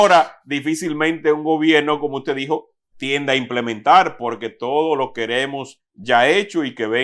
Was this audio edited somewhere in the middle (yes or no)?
no